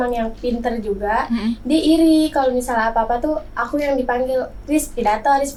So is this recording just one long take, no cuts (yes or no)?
yes